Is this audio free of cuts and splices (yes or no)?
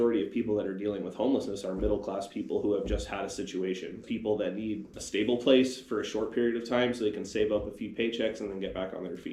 no